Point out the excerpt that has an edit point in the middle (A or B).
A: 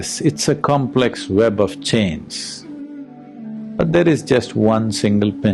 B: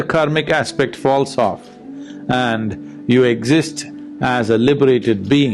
A